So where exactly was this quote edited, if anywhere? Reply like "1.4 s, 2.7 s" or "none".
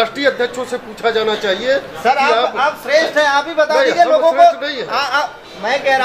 none